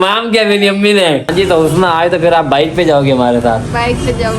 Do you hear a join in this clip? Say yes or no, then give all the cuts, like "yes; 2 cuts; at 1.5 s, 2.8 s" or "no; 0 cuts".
yes; 1 cut; at 1.3 s